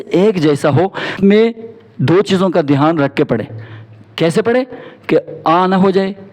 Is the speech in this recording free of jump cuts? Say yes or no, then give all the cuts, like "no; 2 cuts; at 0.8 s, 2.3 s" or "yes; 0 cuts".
no; 1 cut; at 1.1 s